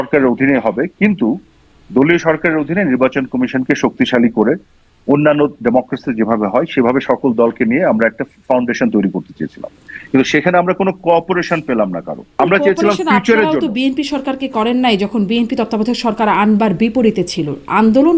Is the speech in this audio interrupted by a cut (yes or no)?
yes